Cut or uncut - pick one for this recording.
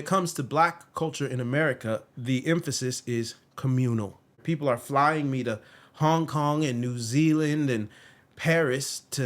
cut